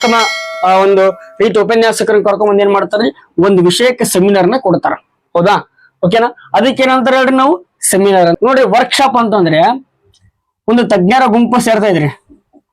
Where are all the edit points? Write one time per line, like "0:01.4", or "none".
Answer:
0:08.4

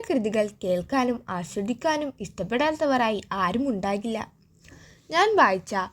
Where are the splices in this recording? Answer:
none

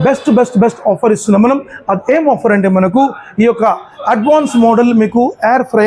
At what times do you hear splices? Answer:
none

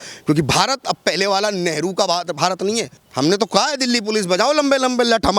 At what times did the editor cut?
0:03.0

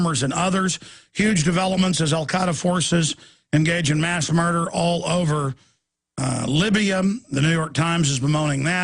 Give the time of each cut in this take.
0:06.4

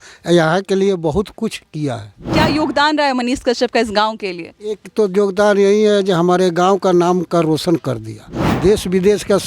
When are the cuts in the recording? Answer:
0:02.3

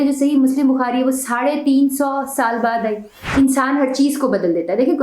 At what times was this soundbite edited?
0:03.1

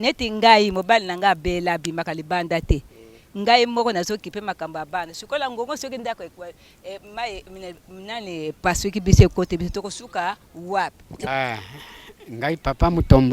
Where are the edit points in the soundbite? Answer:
0:11.1

